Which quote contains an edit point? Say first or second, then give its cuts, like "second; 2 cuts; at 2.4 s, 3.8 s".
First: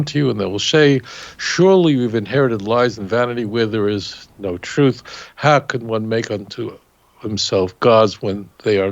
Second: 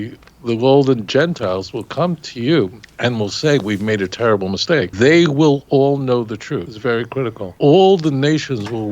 second; 4 cuts; at 2.8 s, 4.9 s, 6.7 s, 7.5 s